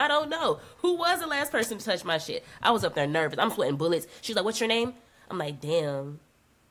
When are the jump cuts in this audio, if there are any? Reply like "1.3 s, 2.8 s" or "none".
none